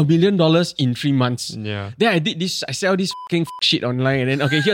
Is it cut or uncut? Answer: uncut